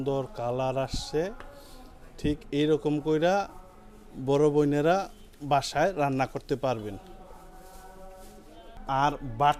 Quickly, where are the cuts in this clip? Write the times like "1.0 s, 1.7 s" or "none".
none